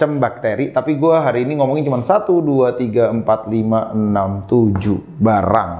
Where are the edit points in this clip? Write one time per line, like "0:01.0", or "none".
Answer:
none